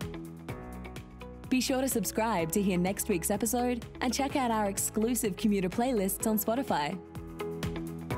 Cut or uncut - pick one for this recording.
cut